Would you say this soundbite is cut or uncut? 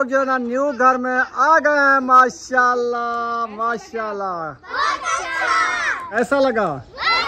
uncut